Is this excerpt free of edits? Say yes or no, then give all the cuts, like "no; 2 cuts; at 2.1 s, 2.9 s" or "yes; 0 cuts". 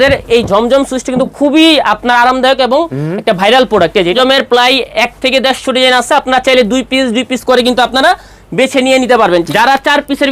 no; 2 cuts; at 4.1 s, 9.5 s